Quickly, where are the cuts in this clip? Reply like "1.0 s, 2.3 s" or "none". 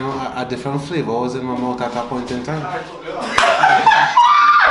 none